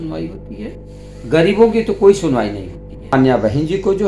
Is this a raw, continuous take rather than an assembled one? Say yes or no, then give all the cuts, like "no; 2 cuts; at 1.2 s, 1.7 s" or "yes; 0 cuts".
no; 1 cut; at 3.1 s